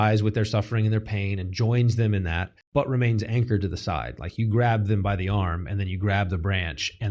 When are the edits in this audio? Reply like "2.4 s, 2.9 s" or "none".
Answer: 2.6 s